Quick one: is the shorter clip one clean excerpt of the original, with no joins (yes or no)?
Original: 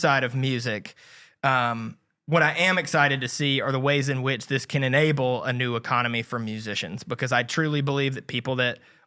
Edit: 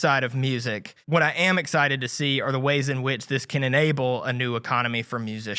no